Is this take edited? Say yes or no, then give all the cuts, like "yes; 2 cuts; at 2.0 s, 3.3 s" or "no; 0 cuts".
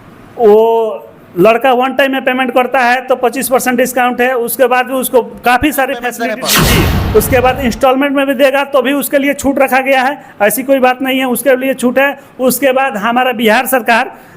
yes; 1 cut; at 6.4 s